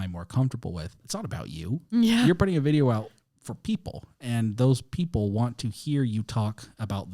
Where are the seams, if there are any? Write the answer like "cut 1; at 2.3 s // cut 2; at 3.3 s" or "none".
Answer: cut 1; at 1.0 s

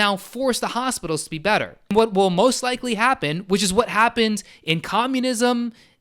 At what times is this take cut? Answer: cut 1; at 1.9 s

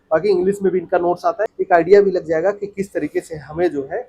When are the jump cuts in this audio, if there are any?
cut 1; at 1.4 s

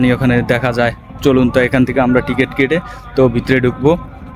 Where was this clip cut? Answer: none

